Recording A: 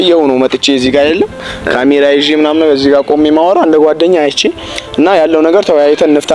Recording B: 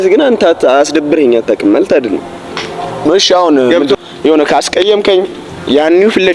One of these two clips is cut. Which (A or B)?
B